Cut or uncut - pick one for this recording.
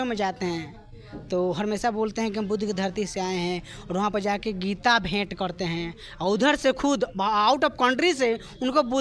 uncut